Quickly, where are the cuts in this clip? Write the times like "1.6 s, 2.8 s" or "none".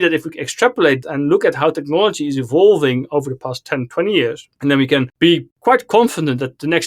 1.0 s, 5.0 s